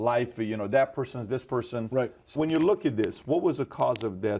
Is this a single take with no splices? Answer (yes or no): no